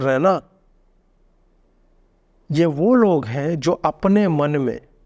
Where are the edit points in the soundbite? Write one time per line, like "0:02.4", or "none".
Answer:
none